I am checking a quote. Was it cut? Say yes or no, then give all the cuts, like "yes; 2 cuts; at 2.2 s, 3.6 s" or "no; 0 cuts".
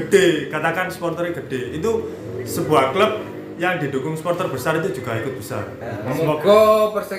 yes; 1 cut; at 6.1 s